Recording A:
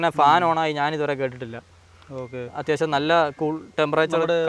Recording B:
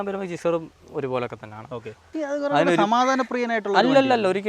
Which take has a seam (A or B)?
B